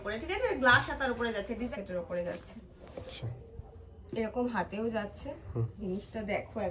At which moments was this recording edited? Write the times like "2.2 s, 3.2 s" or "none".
1.7 s